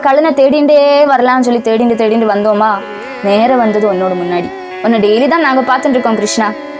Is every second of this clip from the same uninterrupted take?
no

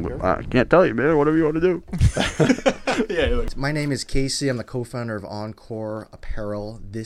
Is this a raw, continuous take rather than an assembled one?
no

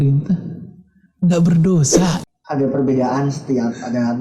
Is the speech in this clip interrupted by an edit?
yes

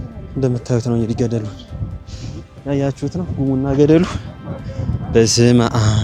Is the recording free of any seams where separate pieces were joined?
yes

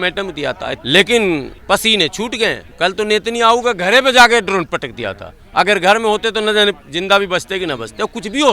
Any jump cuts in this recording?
yes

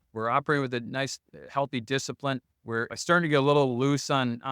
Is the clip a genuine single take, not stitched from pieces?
no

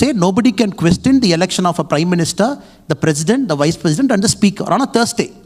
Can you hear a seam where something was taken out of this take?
no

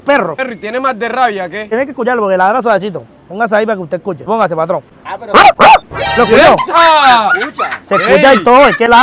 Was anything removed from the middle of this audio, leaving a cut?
yes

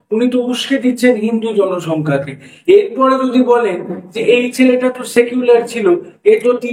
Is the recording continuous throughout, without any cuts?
yes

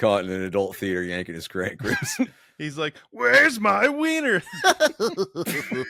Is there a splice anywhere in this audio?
no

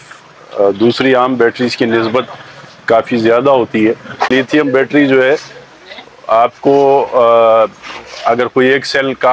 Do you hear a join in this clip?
yes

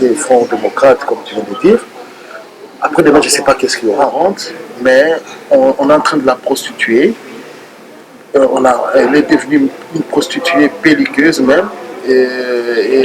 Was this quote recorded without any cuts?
no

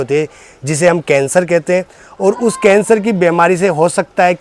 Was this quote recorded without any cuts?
yes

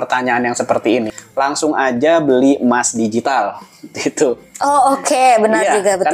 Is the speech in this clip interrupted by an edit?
yes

